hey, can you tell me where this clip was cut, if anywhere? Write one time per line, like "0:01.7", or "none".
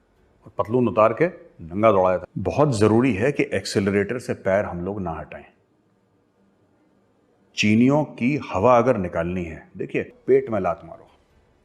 0:02.3
0:10.2